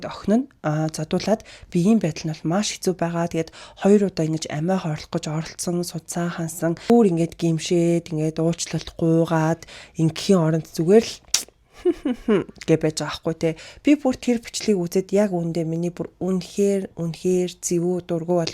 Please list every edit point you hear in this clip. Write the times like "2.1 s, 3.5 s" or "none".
6.9 s, 13.7 s